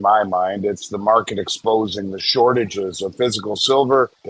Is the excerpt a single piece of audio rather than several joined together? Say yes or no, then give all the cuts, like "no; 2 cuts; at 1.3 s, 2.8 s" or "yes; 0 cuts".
yes; 0 cuts